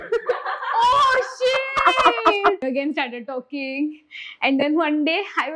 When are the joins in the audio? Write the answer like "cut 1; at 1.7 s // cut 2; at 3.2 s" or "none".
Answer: cut 1; at 2.6 s